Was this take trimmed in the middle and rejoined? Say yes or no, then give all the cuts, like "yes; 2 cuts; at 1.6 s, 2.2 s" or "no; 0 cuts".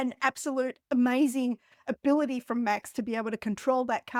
no; 0 cuts